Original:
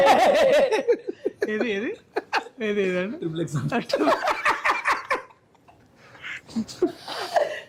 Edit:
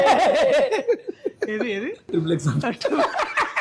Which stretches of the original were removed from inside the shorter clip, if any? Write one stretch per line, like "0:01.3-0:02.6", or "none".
0:02.0-0:03.1